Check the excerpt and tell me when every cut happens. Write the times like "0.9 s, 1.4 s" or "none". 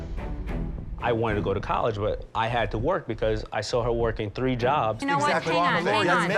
5.0 s